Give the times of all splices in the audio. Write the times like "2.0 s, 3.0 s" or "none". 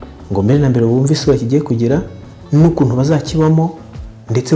2.4 s